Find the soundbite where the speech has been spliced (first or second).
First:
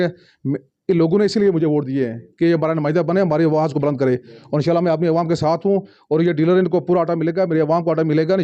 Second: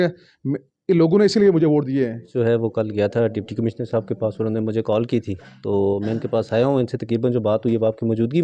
second